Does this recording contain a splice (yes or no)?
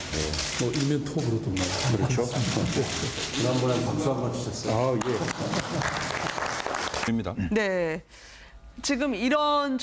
no